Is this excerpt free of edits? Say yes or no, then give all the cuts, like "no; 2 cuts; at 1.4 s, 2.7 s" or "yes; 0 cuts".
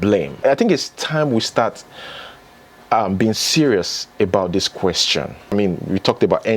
no; 1 cut; at 5.5 s